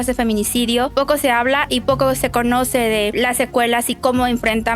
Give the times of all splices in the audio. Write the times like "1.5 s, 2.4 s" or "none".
0.9 s, 3.1 s